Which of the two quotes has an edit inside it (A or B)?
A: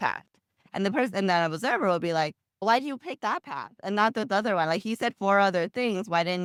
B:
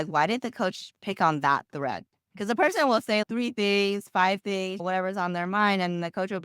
B